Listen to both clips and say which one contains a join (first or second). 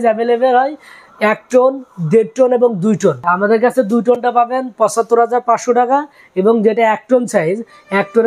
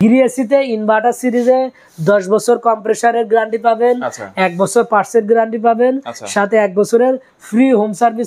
first